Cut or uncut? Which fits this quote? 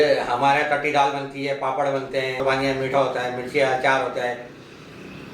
cut